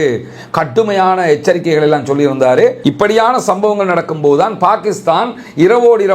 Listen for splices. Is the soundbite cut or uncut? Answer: cut